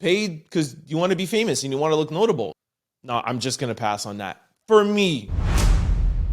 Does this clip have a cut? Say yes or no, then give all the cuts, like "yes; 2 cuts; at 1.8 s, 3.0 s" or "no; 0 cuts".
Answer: yes; 2 cuts; at 2.5 s, 5.4 s